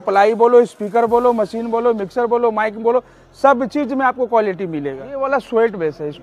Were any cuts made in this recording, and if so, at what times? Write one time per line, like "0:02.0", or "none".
0:05.1